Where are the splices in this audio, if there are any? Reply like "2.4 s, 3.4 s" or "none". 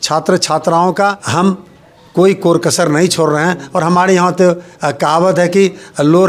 1.2 s